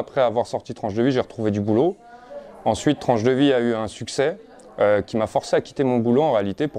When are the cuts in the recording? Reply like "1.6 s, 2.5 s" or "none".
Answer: none

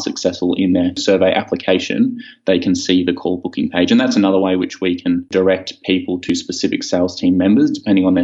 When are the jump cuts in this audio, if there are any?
0.9 s, 5.3 s

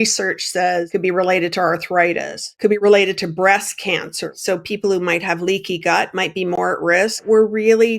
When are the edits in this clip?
0.9 s, 2.7 s, 4.3 s, 7.2 s

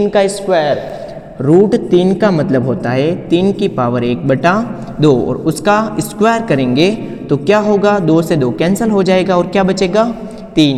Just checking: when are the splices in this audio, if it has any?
none

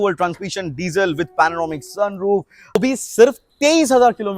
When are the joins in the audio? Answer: 2.8 s

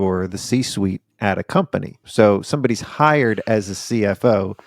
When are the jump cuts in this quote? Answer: 2.0 s

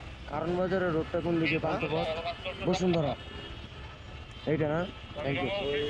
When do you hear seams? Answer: none

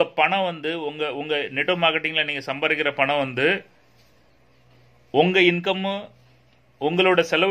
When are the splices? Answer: none

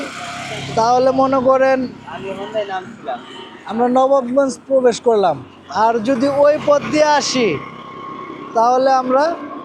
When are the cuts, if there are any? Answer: none

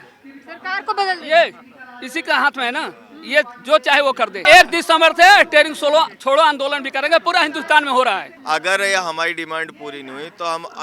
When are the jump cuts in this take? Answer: 4.4 s, 8.3 s

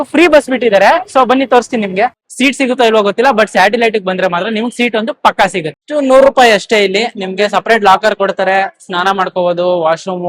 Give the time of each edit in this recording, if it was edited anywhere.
2.3 s, 5.8 s

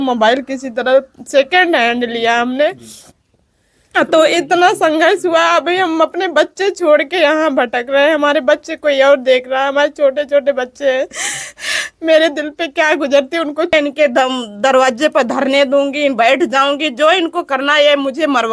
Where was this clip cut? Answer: 13.7 s

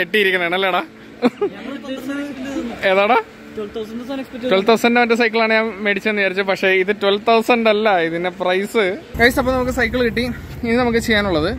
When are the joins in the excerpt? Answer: 9.2 s

